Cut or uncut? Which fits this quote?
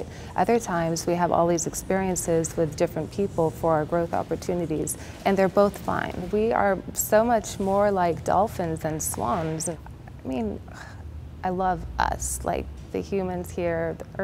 cut